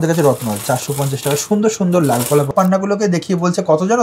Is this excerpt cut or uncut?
cut